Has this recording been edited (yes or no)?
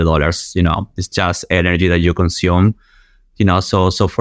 no